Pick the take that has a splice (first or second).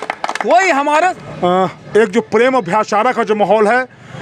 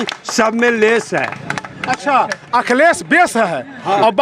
first